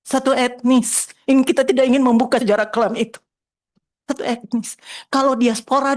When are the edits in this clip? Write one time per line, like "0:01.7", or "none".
none